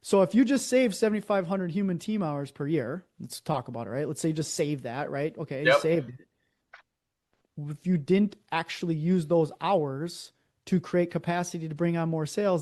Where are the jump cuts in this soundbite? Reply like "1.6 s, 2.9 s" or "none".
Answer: none